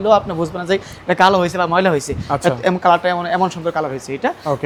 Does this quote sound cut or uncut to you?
uncut